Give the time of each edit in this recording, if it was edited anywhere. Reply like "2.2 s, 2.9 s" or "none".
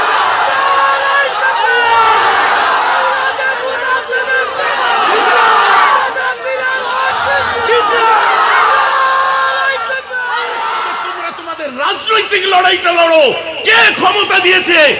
11.3 s